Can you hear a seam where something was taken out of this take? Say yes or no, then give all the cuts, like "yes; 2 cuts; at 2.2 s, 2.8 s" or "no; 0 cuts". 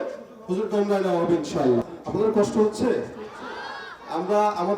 yes; 1 cut; at 2.0 s